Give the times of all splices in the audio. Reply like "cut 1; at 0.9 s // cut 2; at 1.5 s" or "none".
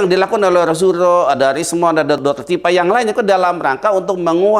cut 1; at 2.2 s